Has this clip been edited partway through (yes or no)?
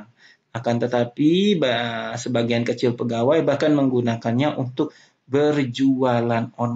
no